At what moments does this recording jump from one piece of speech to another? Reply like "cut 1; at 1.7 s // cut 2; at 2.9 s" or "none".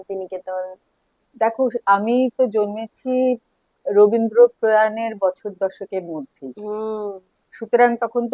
none